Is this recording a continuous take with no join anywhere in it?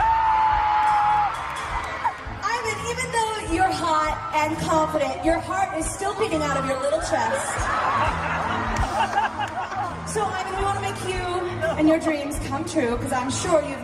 yes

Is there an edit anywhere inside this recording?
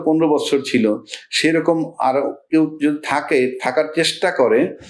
no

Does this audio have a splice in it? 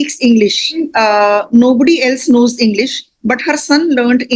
no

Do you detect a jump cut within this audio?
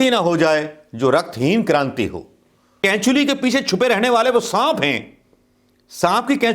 yes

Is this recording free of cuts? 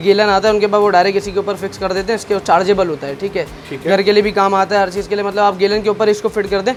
yes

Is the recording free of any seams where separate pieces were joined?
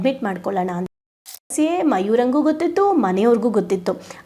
no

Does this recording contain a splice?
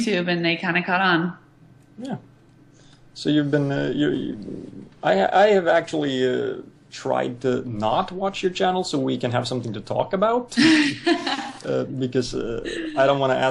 no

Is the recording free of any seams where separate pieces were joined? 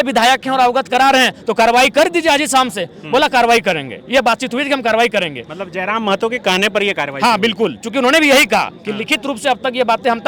yes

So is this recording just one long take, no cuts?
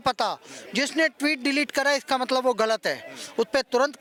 yes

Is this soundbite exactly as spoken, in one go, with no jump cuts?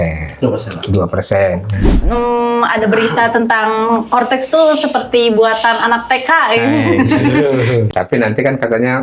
no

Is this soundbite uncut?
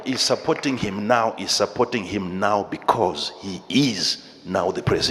yes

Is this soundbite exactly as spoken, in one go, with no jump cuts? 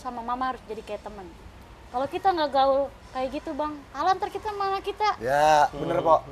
yes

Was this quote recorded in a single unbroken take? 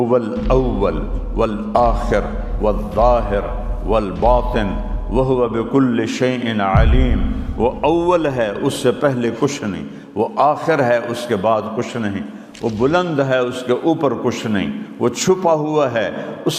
yes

